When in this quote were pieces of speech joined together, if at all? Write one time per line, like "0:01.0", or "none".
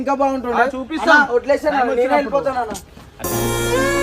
none